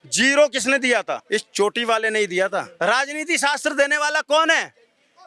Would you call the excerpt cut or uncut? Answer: cut